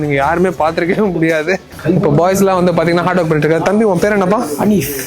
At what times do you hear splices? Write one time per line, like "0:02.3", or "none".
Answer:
0:01.7